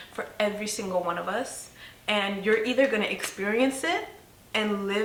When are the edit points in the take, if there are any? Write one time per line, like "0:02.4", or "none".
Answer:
none